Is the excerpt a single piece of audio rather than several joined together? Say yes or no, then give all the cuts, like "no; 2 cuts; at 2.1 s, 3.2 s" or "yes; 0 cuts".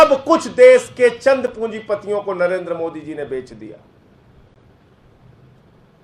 yes; 0 cuts